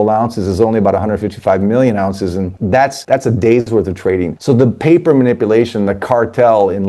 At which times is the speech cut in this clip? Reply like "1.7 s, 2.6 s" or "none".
2.8 s, 4.3 s